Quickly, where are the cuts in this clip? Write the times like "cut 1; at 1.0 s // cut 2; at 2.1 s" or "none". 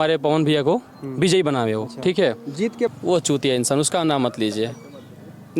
cut 1; at 2.9 s